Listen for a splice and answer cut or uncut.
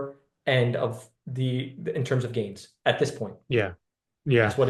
uncut